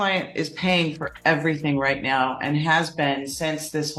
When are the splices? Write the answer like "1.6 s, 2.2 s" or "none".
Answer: none